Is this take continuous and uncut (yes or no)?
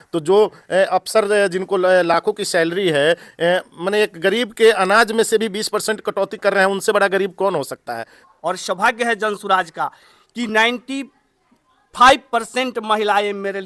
no